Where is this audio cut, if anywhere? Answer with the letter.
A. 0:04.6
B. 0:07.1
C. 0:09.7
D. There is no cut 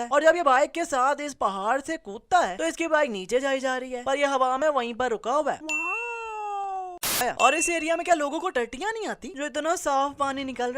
B